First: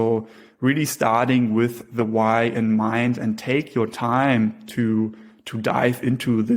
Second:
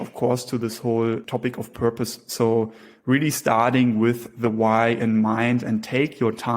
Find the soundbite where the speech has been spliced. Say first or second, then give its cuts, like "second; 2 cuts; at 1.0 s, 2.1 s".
second; 1 cut; at 1.2 s